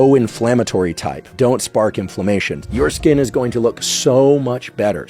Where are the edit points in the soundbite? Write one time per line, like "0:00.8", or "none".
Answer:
0:01.3
0:02.6